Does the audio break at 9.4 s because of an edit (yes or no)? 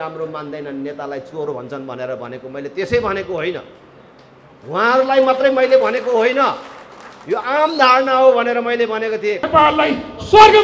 yes